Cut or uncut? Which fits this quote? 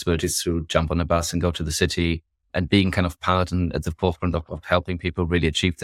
cut